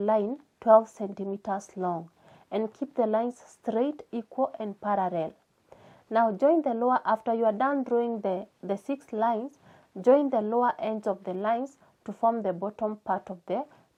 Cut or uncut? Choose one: uncut